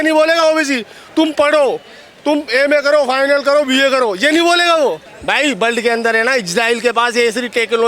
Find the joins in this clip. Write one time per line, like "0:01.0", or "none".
0:05.1